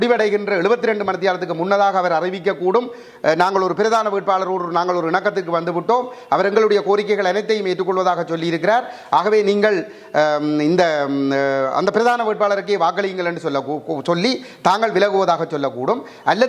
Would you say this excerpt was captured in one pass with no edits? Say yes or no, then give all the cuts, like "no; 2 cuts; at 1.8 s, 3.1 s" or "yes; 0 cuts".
yes; 0 cuts